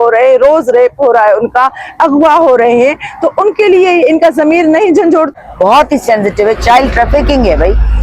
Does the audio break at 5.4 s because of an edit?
yes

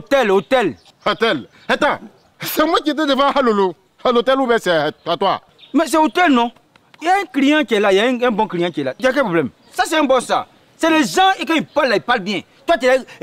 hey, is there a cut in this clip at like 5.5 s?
no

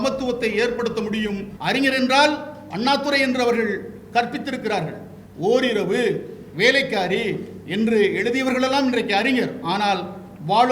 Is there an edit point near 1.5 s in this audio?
yes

